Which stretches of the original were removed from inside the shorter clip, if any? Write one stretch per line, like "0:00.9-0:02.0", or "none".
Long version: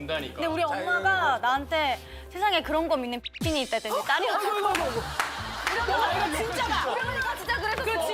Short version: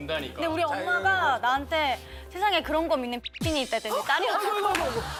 none